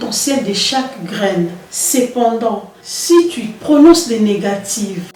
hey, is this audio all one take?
yes; 0 cuts

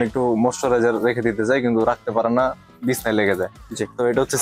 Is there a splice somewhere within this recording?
no; 0 cuts

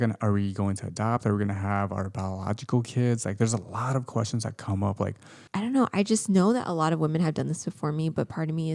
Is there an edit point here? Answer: yes; 1 cut; at 5.3 s

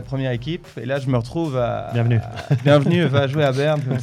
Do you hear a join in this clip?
no; 0 cuts

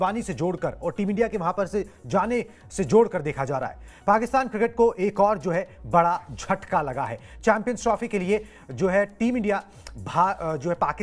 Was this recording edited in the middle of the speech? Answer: no; 0 cuts

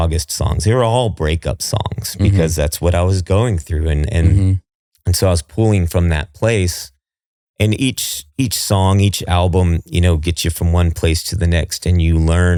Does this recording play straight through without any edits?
yes; 0 cuts

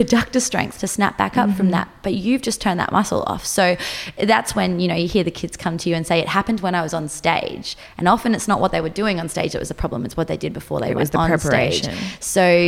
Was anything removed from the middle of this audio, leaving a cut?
no; 0 cuts

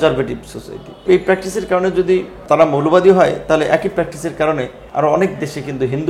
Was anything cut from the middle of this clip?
yes; 3 cuts; at 1.0 s, 2.4 s, 4.8 s

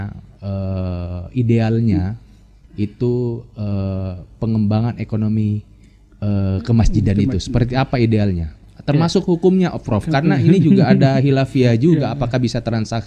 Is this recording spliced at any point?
no; 0 cuts

